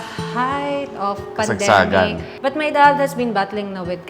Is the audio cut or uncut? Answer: cut